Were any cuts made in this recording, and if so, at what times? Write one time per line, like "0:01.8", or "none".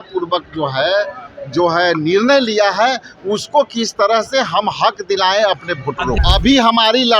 0:06.2